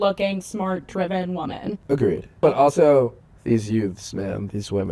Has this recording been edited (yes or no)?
yes